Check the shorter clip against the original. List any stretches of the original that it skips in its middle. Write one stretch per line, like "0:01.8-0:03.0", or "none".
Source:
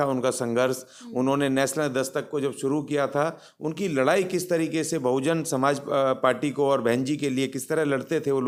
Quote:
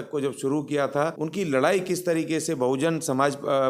0:03.4-0:03.6

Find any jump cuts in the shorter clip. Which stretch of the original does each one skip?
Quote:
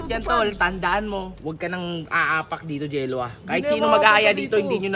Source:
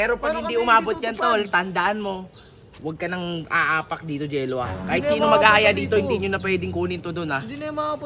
0:02.3-0:02.7

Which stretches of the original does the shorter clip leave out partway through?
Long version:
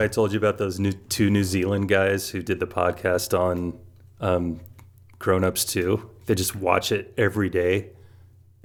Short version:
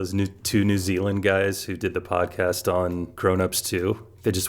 0:03.8-0:05.1

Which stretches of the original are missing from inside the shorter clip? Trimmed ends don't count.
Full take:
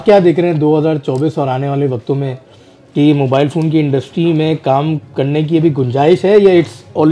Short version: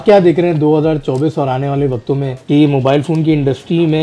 0:02.3-0:02.8

